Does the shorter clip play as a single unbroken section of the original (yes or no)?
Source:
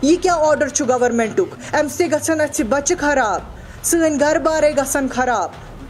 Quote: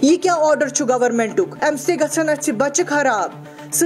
no